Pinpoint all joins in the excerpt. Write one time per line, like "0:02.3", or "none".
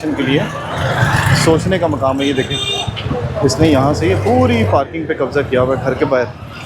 none